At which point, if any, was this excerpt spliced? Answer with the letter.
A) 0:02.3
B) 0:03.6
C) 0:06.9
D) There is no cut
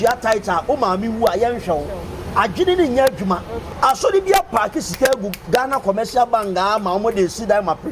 B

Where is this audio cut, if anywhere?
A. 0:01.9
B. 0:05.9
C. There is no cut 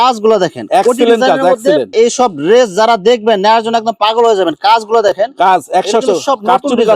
A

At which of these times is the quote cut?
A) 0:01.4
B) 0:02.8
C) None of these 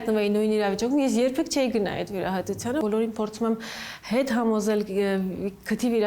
B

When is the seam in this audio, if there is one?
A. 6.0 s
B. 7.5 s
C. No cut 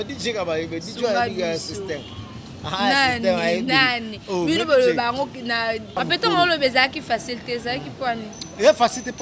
A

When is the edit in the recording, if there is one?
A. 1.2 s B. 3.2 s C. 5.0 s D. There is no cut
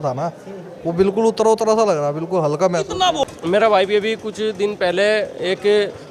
B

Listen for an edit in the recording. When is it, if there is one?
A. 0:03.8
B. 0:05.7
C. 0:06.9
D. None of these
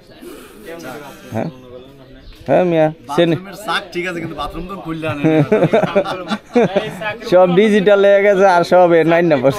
D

